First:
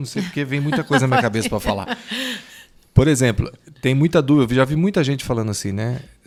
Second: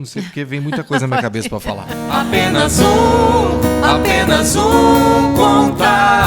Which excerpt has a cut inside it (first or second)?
second